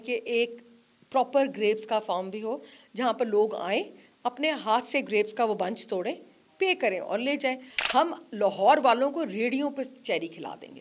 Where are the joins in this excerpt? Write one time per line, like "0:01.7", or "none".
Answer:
0:07.7